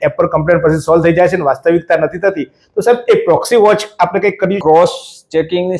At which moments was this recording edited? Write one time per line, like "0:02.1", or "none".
0:04.6